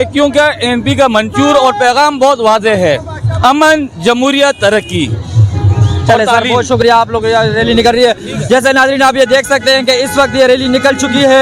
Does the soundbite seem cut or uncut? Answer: uncut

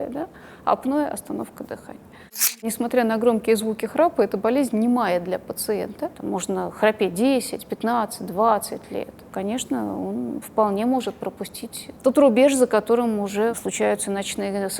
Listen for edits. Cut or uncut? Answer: cut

